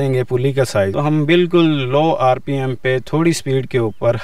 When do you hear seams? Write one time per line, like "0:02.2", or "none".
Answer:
0:00.9